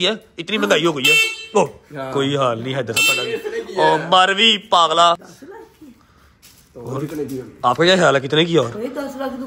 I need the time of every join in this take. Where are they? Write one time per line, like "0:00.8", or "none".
none